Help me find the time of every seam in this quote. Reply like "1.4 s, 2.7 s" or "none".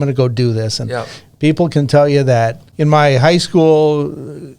2.6 s